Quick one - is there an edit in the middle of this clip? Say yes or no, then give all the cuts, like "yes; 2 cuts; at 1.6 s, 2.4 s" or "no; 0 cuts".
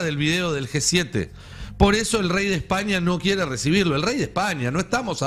no; 0 cuts